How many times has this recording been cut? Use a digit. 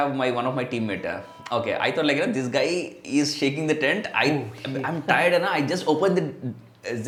0